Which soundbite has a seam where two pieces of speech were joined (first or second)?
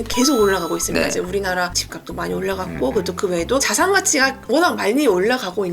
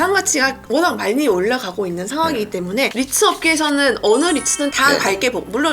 second